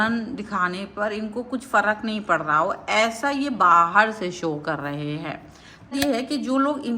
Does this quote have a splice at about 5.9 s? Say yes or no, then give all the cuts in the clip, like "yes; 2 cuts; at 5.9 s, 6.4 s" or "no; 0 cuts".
yes; 1 cut; at 5.9 s